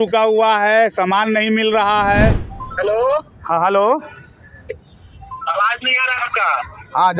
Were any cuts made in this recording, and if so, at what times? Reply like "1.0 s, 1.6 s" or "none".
2.5 s